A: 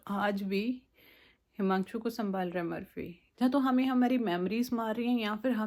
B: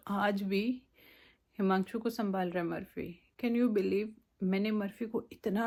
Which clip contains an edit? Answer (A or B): A